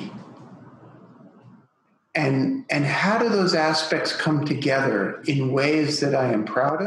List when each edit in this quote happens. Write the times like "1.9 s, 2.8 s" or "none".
none